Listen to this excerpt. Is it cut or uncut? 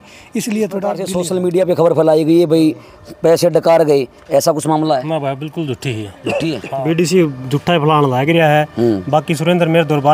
cut